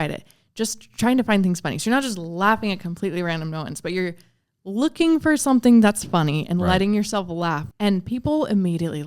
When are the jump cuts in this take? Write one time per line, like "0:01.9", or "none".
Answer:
0:07.7